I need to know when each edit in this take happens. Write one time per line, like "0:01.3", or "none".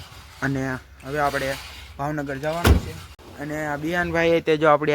0:03.3